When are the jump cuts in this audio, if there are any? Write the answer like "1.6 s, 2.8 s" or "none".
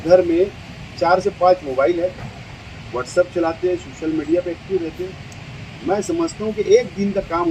none